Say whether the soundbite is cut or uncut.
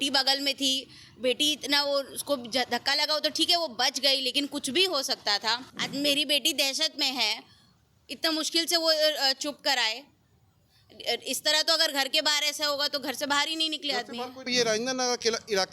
cut